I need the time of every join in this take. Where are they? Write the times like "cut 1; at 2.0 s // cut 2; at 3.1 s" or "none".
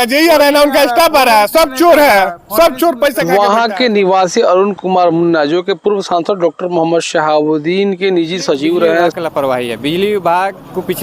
cut 1; at 3.2 s // cut 2; at 9.2 s